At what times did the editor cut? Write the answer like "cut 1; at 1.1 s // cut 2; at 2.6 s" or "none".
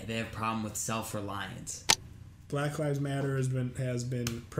cut 1; at 2.0 s

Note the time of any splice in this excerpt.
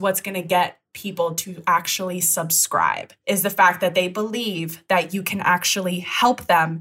cut 1; at 3.1 s

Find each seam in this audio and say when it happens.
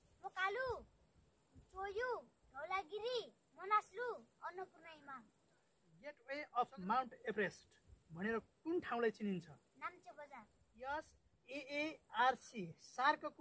cut 1; at 6.2 s // cut 2; at 10.6 s

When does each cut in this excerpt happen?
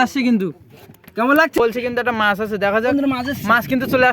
cut 1; at 1.6 s

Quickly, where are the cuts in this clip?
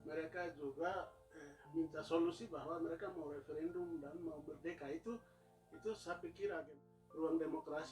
cut 1; at 6.7 s

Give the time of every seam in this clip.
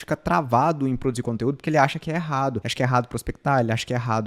cut 1; at 2.6 s

